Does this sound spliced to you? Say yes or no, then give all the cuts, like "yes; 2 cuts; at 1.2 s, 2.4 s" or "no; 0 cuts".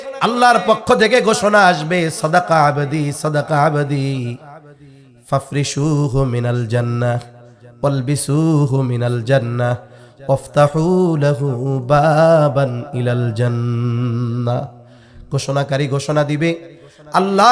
no; 0 cuts